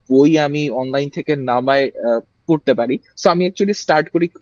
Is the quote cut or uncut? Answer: uncut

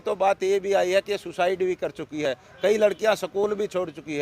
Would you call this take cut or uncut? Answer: uncut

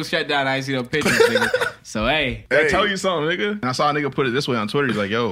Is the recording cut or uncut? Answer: cut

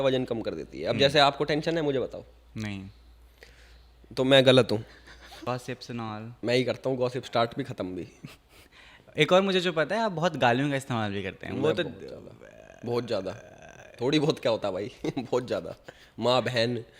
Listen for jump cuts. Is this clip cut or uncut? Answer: cut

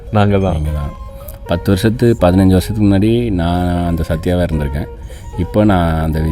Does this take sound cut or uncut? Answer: uncut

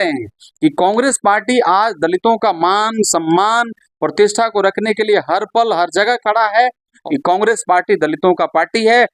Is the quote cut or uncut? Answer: cut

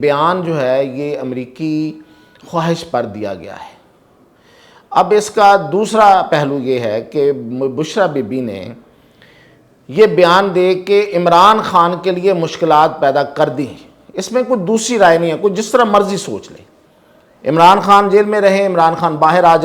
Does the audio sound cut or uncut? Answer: uncut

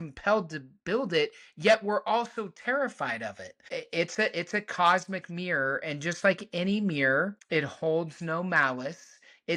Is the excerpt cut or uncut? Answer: cut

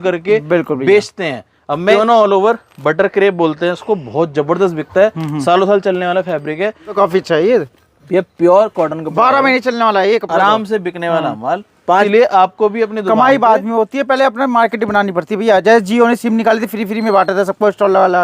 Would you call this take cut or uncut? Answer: cut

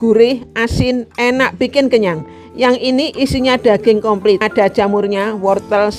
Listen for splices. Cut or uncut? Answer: cut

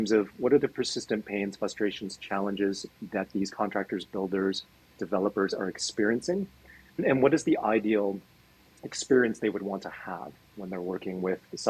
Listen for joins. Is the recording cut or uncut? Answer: cut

